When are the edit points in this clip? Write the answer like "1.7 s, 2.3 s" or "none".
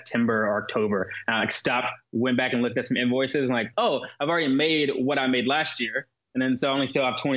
3.7 s